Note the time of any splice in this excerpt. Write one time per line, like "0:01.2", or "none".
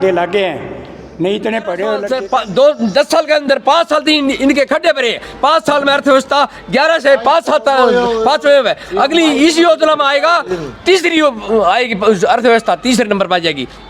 0:02.1